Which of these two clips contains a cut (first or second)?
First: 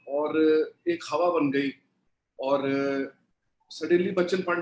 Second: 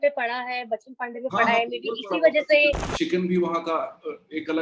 second